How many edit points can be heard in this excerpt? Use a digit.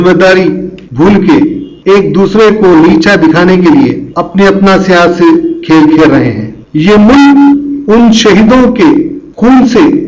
1